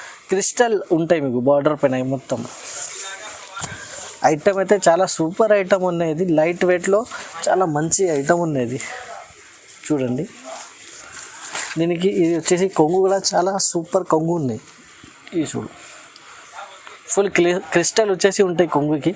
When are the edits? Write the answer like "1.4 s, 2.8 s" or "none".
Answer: none